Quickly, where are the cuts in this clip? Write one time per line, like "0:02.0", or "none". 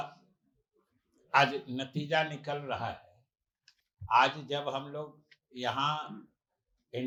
none